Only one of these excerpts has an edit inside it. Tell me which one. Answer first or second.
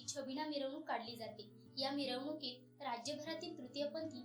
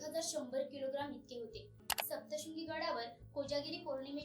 second